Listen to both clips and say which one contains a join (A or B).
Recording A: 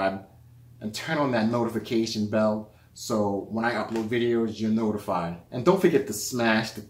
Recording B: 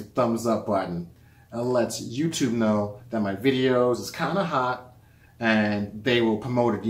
A